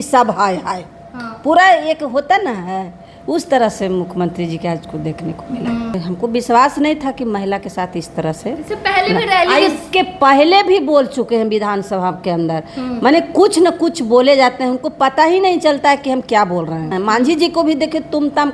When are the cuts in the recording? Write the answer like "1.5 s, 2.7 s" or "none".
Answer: 6.0 s, 16.9 s

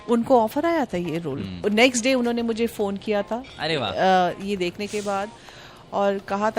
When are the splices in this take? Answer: 1.6 s

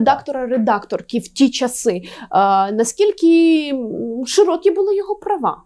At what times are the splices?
none

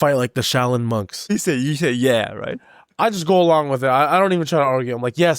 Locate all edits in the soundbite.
1.3 s

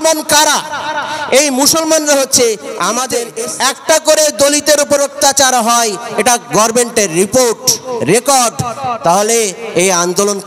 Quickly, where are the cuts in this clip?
3.4 s

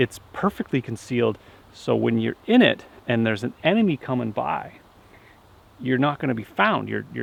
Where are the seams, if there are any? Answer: none

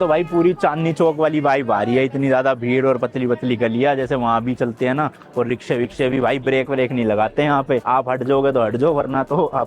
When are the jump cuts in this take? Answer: none

